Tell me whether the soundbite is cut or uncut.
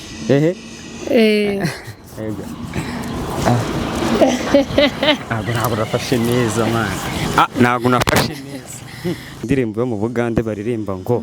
cut